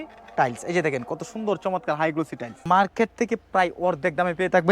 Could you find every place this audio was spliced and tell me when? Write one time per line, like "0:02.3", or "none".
0:02.6